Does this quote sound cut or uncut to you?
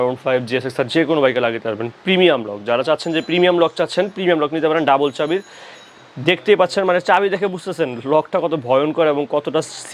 uncut